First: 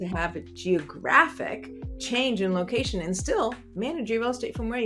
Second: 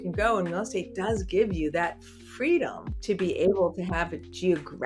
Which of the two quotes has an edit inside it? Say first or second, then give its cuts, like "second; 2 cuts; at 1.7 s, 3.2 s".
second; 1 cut; at 2.9 s